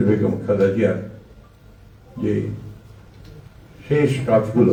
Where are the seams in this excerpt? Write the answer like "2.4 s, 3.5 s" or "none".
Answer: none